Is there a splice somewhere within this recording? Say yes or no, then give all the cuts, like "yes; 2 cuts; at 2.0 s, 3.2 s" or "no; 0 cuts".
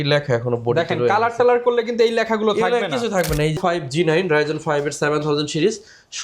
yes; 1 cut; at 3.6 s